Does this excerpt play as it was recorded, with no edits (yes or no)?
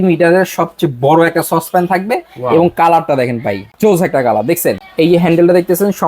no